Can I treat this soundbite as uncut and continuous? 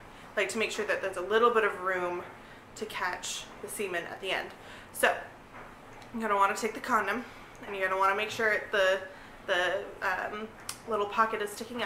yes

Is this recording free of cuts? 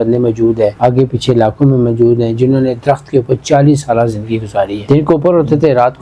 no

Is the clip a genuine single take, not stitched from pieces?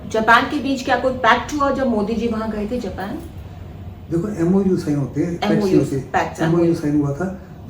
yes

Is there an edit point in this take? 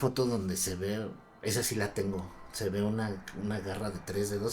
no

